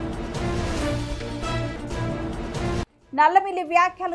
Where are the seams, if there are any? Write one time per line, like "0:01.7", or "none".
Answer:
0:01.3
0:02.8